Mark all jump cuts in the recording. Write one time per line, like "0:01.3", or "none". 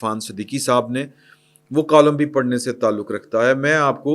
none